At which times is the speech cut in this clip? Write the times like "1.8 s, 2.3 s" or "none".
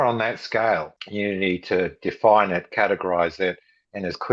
1.0 s